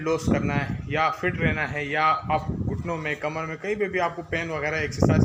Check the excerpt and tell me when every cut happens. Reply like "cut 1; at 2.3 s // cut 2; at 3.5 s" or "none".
none